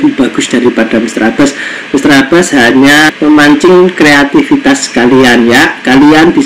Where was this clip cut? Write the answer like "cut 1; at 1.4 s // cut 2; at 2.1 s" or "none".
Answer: cut 1; at 3.1 s